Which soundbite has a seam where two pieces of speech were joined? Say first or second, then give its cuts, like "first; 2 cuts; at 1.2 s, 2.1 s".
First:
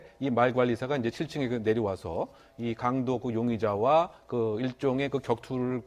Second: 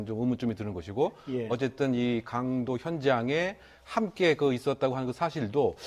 first; 1 cut; at 2.9 s